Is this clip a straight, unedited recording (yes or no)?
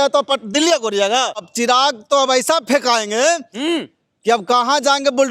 no